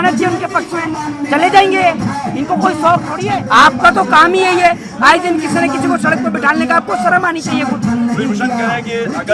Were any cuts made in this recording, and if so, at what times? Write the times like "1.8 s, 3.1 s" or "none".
none